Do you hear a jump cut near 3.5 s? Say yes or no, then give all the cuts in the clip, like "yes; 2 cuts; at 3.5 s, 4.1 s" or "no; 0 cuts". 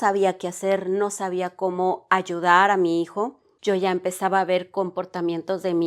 yes; 1 cut; at 3.5 s